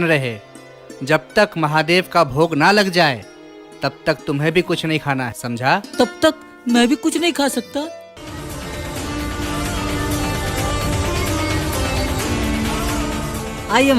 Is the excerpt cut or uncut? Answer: cut